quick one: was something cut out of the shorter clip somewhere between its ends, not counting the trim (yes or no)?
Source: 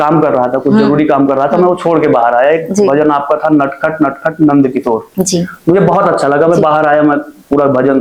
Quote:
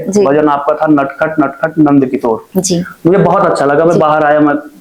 no